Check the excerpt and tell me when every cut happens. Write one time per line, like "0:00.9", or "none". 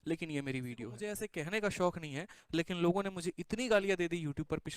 0:01.0